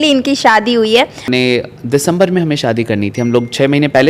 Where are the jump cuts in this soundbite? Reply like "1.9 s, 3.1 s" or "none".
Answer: 1.3 s